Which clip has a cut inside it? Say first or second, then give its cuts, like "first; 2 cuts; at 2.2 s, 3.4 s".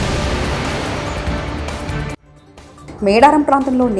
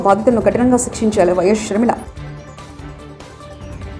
first; 1 cut; at 2.3 s